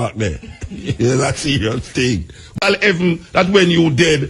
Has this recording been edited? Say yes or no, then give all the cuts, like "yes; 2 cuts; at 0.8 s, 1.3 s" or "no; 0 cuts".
yes; 1 cut; at 2.6 s